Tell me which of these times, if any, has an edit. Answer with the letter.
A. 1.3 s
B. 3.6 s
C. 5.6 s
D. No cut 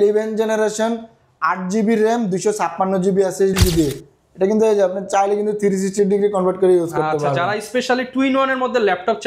B